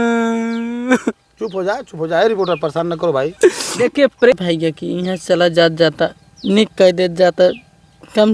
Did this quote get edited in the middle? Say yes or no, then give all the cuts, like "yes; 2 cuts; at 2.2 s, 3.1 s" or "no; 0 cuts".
yes; 1 cut; at 4.3 s